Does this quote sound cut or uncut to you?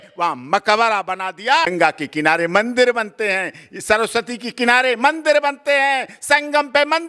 cut